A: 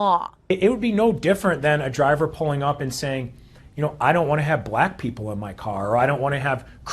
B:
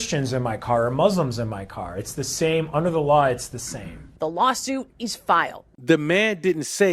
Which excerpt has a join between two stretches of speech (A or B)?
B